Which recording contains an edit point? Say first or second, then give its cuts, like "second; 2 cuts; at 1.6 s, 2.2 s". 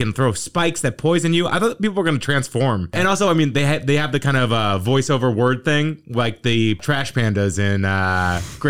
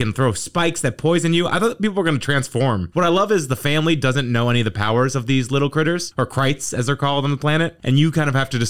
first; 2 cuts; at 2.9 s, 6.8 s